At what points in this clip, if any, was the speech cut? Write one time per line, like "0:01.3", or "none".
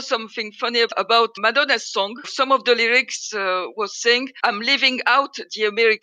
0:01.4
0:04.3